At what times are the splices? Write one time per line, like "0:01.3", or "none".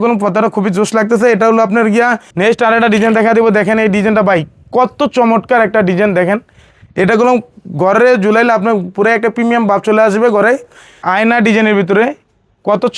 0:02.2
0:10.9